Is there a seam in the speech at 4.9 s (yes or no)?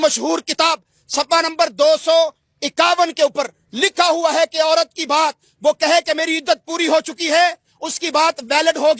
no